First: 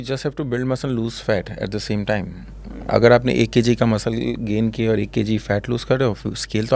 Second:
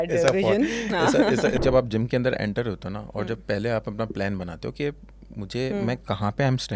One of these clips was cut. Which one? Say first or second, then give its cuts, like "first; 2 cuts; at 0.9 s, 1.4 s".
second; 1 cut; at 1.6 s